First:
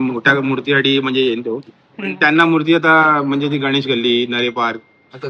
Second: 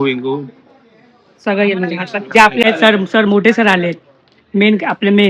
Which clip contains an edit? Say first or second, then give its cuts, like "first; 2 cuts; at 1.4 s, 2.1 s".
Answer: second; 1 cut; at 2.6 s